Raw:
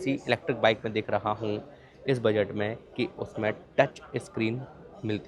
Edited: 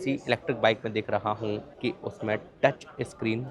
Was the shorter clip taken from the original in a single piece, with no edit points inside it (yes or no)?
no